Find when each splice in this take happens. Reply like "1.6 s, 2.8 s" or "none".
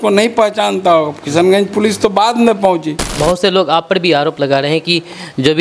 3.1 s